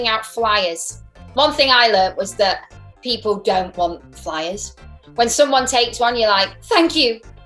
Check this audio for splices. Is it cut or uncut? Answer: cut